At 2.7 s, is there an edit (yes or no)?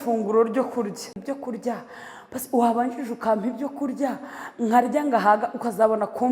no